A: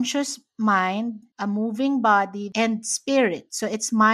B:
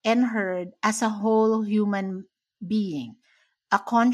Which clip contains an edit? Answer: A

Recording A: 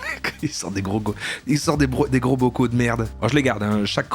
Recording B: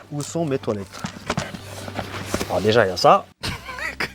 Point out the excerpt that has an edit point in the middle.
A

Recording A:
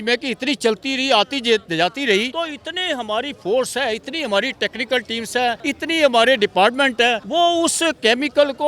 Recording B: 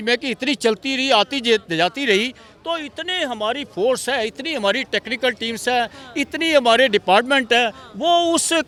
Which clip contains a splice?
A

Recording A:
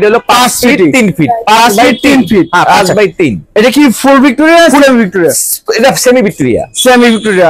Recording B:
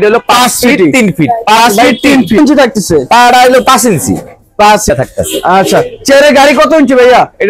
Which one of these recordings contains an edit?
B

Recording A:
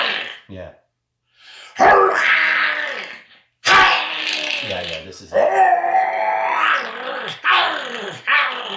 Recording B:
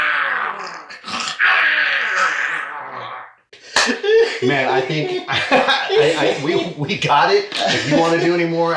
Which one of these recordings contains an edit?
B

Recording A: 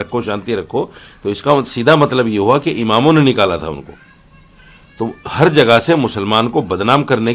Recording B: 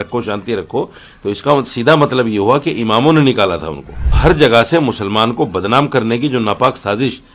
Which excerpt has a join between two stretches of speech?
B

